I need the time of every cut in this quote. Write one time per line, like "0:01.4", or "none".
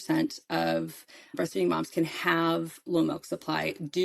none